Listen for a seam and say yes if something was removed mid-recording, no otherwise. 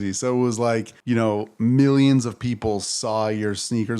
yes